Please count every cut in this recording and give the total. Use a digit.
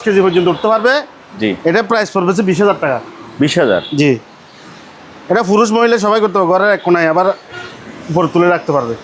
0